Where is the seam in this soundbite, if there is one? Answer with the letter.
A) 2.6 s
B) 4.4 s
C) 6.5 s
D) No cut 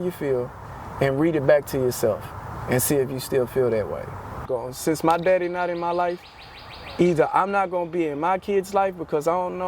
B